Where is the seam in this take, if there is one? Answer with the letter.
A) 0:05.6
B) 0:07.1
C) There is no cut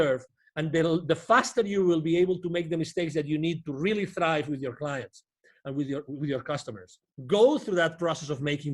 B